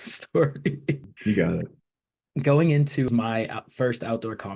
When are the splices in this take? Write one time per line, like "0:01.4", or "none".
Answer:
0:01.1
0:02.1
0:03.1